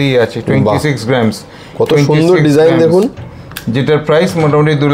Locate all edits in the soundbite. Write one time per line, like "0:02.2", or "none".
none